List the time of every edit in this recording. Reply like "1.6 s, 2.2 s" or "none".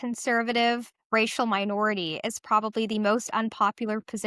0.9 s